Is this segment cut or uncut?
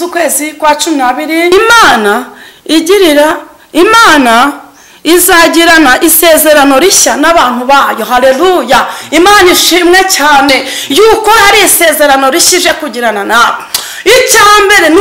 cut